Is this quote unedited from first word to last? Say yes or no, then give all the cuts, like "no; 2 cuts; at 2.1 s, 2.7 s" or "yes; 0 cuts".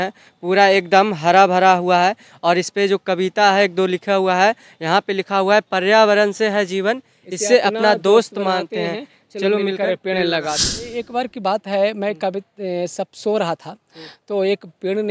no; 1 cut; at 11.0 s